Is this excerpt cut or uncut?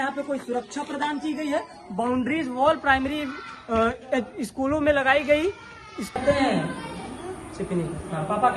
cut